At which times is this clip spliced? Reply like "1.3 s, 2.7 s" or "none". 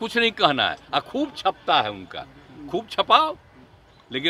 none